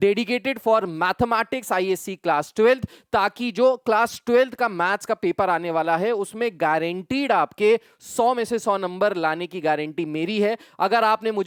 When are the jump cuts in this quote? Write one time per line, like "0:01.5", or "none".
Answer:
none